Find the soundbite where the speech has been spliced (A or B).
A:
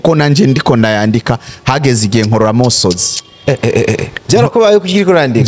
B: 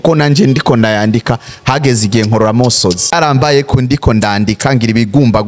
B